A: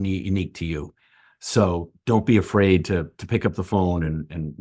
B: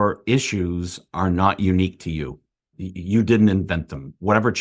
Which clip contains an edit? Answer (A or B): B